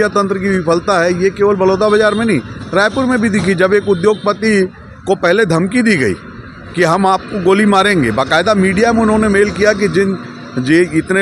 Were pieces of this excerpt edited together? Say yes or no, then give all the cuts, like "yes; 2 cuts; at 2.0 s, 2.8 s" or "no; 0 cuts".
no; 0 cuts